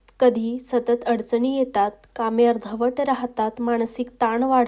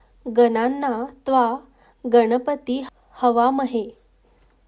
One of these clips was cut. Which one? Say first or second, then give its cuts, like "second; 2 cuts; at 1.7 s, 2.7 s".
second; 1 cut; at 3.0 s